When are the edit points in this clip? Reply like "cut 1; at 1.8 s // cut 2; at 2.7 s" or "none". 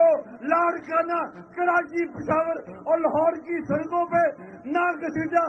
none